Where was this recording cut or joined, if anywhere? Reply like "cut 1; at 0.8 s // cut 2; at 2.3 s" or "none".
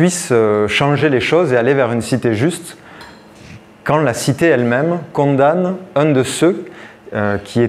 none